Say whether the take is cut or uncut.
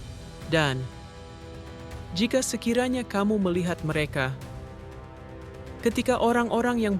cut